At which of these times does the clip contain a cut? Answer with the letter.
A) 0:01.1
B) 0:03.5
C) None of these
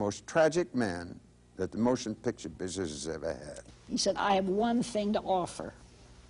B